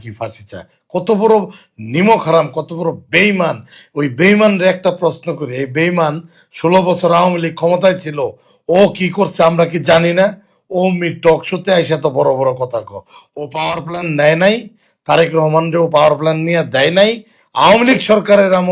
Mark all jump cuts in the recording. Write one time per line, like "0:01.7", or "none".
none